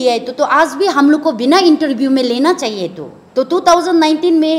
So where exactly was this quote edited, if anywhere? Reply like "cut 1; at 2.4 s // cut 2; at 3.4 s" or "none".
none